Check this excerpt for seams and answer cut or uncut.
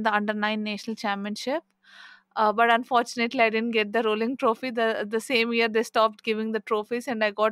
uncut